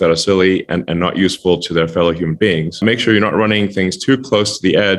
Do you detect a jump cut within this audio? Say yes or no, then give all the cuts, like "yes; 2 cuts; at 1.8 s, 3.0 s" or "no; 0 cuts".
yes; 1 cut; at 2.8 s